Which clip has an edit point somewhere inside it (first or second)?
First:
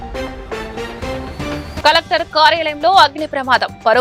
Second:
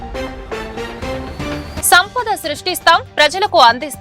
second